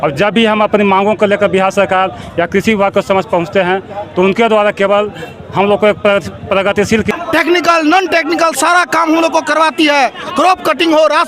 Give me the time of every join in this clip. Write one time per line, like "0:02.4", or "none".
0:07.1